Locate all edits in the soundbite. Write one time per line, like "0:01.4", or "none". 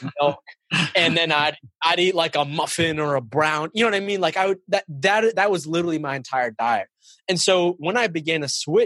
none